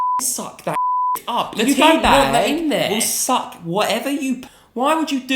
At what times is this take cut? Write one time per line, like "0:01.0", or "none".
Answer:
0:04.4